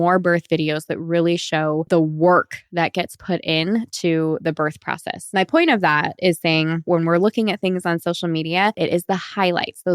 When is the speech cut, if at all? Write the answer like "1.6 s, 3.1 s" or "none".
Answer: 1.8 s, 5.1 s, 6.8 s, 8.8 s